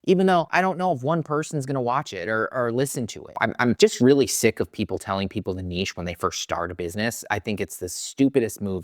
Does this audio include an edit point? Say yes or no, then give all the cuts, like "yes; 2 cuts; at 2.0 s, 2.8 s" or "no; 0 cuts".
yes; 1 cut; at 3.6 s